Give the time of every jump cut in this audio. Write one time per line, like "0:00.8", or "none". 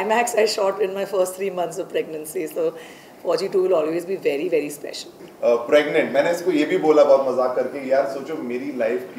0:05.2

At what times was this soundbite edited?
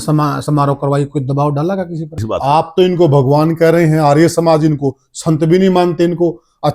0:02.3

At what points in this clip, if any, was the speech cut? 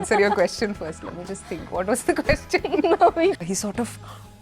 0:03.5

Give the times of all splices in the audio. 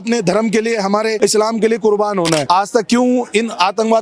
0:01.1
0:02.4

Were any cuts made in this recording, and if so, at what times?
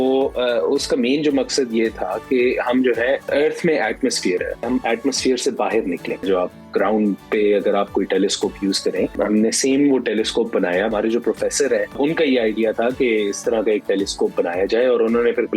0:03.2
0:04.7
0:06.2
0:09.1
0:10.9
0:12.0

